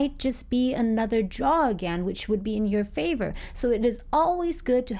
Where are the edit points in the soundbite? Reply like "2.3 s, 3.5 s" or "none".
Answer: none